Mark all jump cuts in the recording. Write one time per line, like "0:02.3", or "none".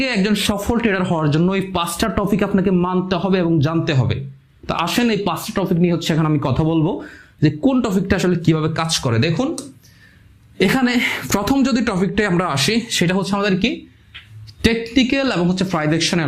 none